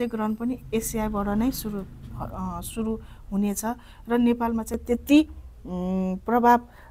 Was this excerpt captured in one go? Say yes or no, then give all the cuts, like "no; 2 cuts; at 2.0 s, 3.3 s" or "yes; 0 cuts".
yes; 0 cuts